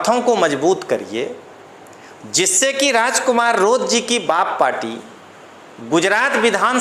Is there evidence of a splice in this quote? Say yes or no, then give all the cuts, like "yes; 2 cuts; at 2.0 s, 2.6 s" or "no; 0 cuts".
no; 0 cuts